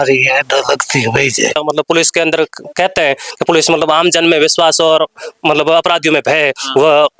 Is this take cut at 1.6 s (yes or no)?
yes